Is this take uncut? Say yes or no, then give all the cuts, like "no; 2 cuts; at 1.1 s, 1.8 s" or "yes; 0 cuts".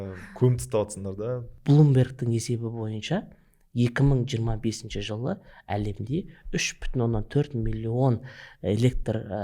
no; 1 cut; at 1.5 s